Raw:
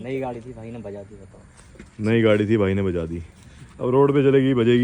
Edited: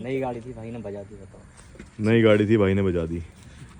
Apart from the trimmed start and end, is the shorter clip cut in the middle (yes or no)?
no